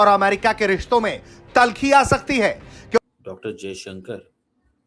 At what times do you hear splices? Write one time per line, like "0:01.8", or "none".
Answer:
0:03.0